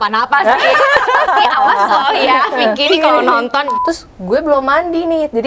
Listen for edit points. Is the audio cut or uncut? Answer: cut